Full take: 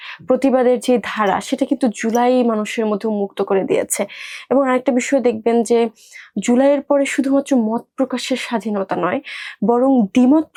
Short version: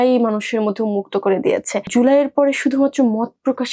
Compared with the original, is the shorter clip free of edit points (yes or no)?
no